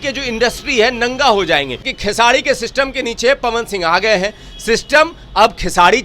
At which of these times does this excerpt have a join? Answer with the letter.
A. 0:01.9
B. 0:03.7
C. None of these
A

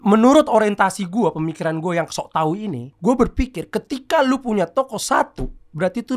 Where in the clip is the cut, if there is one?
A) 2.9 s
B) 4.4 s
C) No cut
A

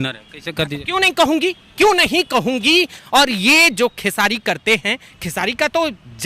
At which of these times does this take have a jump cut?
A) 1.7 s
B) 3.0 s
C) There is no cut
B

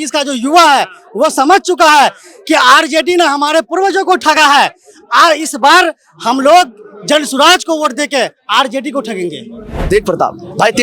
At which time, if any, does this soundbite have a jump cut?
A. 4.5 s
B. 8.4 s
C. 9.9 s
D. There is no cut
C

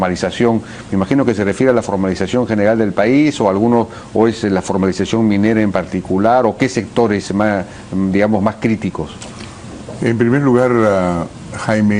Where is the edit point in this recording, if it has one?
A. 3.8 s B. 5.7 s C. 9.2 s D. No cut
B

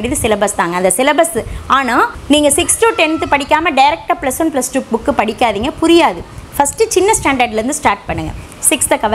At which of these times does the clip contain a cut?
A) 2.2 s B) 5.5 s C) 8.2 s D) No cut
A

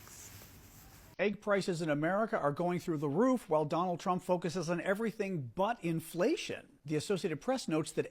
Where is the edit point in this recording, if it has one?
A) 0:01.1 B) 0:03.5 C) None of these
A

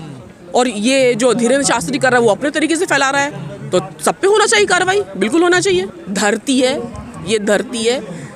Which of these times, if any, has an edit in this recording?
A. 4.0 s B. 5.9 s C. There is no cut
C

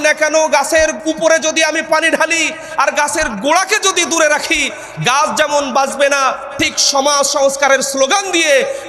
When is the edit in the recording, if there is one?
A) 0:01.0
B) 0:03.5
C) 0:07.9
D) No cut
A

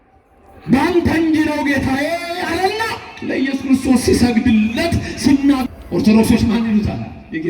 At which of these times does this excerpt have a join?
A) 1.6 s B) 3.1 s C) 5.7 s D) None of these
C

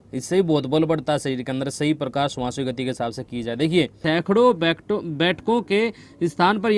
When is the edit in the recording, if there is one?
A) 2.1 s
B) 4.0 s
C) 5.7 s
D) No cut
B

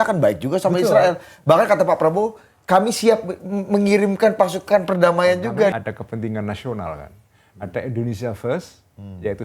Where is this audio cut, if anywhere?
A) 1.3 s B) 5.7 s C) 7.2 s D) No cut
B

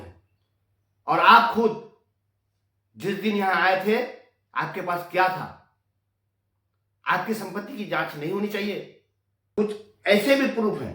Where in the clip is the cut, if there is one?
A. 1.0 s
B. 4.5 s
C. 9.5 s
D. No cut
C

